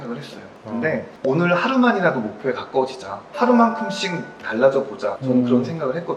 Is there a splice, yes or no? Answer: yes